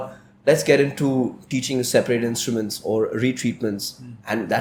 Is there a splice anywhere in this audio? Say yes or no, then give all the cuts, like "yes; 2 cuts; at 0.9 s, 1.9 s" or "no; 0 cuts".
no; 0 cuts